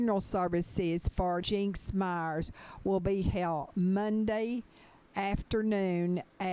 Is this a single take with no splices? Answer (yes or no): no